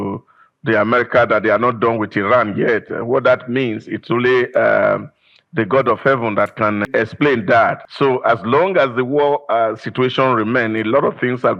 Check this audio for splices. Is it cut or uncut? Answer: cut